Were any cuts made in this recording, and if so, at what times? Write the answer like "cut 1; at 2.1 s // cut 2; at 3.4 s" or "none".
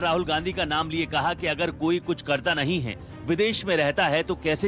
cut 1; at 2.4 s